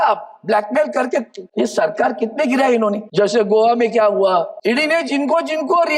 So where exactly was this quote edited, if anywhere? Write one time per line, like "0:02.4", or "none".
0:01.4
0:03.0
0:04.5